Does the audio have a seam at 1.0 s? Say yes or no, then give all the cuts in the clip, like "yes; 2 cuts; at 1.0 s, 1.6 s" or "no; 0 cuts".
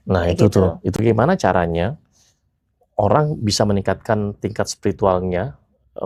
yes; 1 cut; at 1.0 s